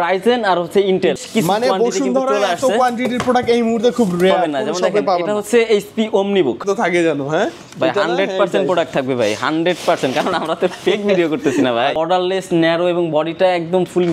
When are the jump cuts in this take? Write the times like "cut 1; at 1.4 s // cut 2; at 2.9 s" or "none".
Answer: cut 1; at 1.2 s // cut 2; at 6.6 s // cut 3; at 12.0 s